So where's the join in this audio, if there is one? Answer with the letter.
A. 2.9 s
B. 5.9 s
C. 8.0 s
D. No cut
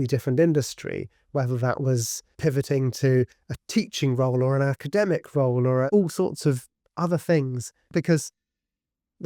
B